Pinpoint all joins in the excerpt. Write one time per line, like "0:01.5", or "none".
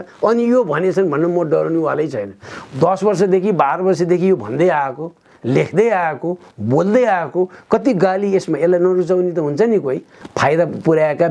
0:10.1